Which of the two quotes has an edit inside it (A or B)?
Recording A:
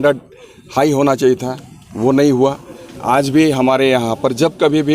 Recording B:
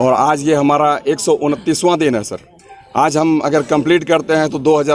A